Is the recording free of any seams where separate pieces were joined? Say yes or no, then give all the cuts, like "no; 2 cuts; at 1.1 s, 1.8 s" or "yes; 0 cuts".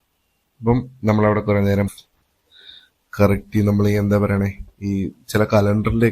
no; 1 cut; at 1.9 s